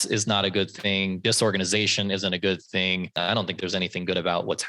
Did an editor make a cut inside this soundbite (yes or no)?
yes